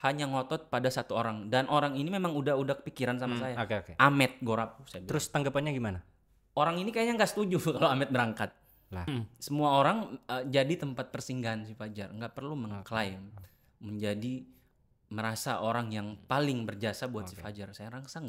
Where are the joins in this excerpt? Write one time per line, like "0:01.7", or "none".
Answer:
0:09.0